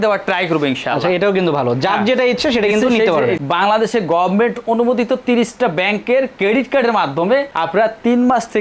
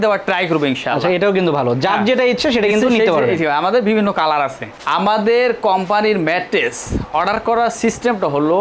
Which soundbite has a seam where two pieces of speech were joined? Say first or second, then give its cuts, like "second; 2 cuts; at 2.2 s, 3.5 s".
first; 1 cut; at 3.4 s